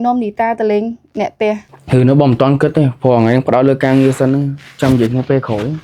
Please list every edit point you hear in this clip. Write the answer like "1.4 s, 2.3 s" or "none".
1.7 s